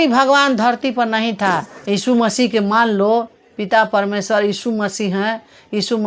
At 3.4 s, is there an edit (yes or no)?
no